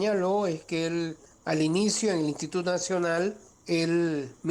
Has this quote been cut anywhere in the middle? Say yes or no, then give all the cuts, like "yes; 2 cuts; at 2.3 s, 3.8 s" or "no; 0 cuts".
yes; 2 cuts; at 1.3 s, 3.5 s